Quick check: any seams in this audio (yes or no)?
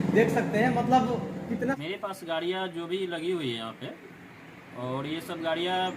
yes